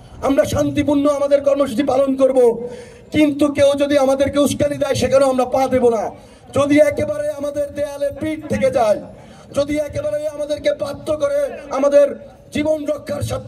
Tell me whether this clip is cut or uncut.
uncut